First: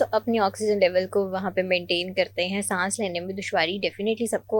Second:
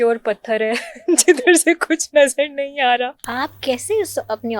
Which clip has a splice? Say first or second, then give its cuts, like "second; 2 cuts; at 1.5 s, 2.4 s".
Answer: second; 1 cut; at 3.2 s